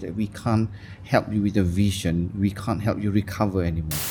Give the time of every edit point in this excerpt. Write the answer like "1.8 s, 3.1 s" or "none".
none